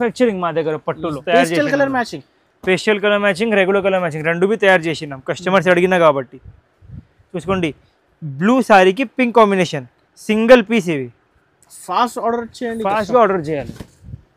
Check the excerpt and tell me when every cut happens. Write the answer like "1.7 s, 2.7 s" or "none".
1.2 s